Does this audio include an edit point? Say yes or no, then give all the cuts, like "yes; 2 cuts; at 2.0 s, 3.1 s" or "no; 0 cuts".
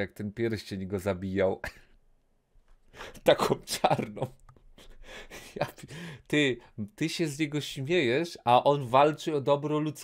no; 0 cuts